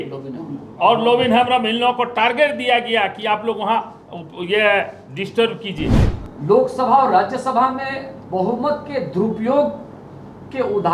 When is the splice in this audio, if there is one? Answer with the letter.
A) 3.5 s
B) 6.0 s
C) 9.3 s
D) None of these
B